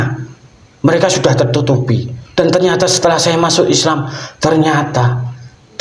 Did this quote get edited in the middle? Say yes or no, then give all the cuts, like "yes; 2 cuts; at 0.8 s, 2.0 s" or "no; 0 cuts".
no; 0 cuts